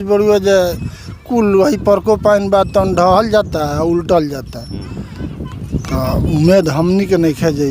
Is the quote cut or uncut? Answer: uncut